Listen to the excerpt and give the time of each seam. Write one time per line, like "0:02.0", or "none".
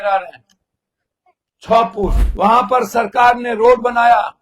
0:02.2